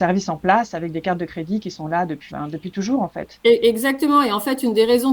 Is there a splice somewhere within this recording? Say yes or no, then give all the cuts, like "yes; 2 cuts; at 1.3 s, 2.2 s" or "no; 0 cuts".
yes; 1 cut; at 2.2 s